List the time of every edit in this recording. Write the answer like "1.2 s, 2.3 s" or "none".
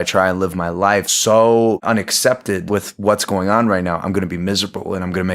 1.1 s, 1.8 s, 2.6 s